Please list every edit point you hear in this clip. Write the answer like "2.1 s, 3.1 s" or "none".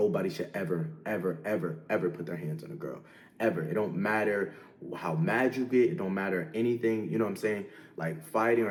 none

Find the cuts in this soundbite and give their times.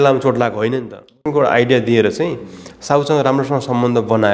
1.2 s

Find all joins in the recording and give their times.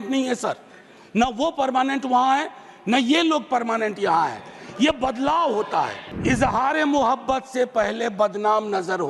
6.1 s

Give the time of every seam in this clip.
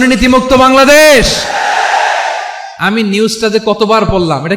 none

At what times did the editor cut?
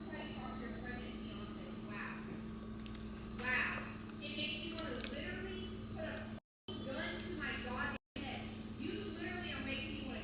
6.4 s

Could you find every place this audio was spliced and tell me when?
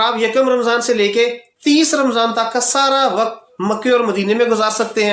none

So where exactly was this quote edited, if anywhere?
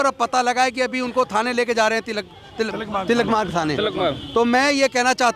none

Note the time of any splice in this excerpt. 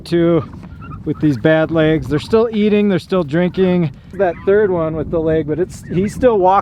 4.1 s

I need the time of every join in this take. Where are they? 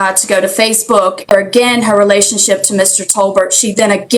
1.3 s

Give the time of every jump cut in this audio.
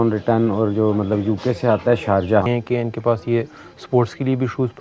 2.5 s

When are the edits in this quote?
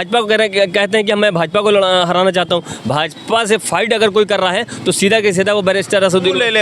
none

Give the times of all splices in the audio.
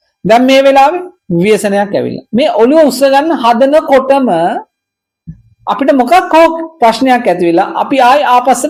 none

